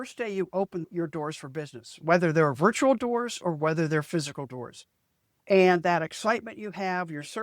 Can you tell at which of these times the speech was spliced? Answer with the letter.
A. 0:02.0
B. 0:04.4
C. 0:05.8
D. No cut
D